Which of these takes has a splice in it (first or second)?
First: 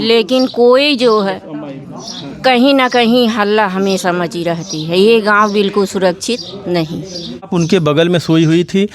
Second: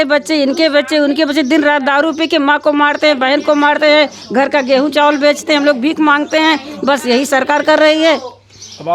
first